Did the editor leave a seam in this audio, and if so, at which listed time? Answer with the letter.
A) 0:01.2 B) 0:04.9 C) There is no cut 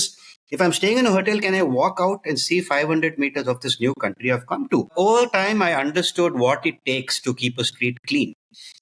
B